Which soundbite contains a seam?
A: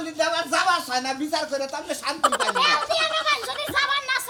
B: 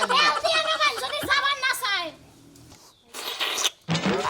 B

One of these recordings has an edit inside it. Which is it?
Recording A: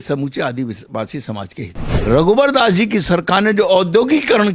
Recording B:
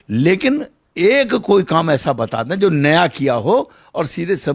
A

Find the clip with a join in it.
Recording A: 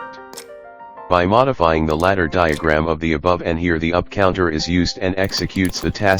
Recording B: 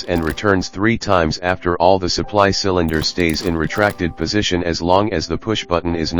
A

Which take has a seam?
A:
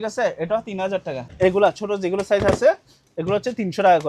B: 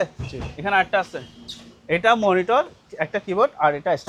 A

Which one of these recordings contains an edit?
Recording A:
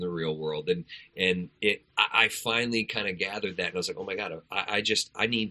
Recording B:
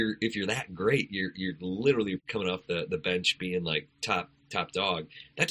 B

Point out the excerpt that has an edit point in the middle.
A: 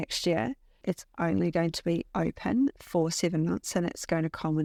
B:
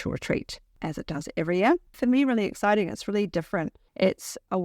B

